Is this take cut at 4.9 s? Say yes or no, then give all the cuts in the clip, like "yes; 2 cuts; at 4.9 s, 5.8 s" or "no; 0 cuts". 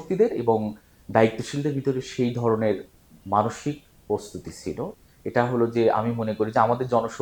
yes; 1 cut; at 4.9 s